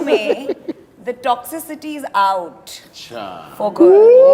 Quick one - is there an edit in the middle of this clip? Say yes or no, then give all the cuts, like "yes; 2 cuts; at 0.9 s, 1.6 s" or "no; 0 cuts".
no; 0 cuts